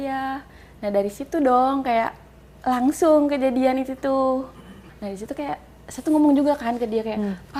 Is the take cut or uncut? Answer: uncut